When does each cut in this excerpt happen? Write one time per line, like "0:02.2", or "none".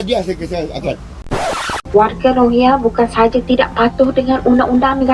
0:01.3